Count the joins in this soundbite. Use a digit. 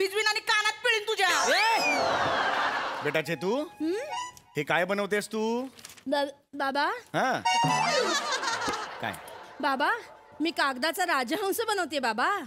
1